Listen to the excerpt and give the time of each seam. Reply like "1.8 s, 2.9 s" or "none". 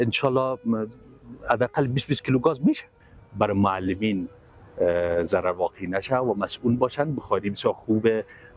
3.0 s